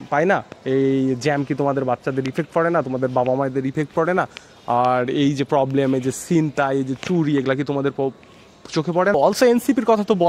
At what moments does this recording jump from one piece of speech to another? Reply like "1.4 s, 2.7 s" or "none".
9.1 s